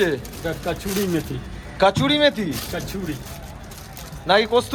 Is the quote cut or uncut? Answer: uncut